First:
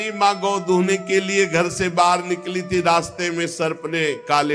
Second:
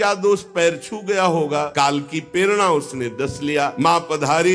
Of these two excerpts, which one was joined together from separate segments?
second; 2 cuts; at 1.7 s, 3.7 s

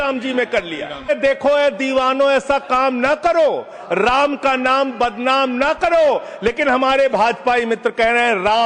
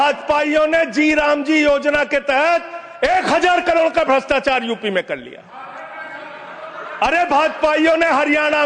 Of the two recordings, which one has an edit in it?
first; 1 cut; at 1.1 s

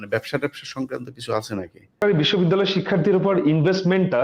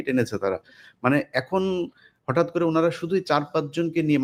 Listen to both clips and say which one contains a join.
first; 1 cut; at 2.0 s

